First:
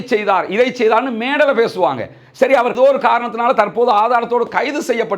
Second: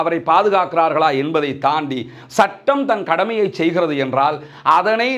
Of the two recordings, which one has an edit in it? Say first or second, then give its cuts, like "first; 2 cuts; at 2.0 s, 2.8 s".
first; 1 cut; at 2.8 s